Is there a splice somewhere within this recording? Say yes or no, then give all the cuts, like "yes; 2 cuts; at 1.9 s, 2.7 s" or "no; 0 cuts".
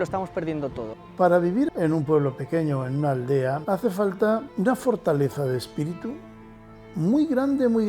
yes; 4 cuts; at 0.9 s, 1.7 s, 3.6 s, 4.5 s